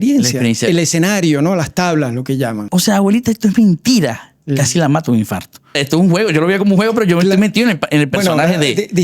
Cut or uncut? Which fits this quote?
cut